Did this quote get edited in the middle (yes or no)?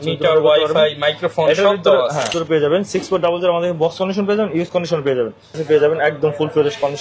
yes